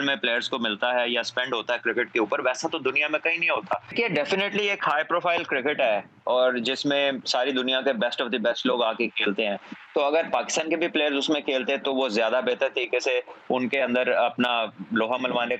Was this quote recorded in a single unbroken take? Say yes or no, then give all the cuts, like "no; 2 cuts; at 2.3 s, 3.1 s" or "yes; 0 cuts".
no; 1 cut; at 3.9 s